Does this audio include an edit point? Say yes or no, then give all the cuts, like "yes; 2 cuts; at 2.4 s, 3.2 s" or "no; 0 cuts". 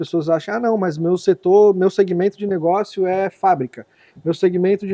no; 0 cuts